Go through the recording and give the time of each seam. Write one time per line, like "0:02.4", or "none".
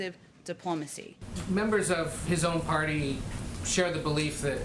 0:01.2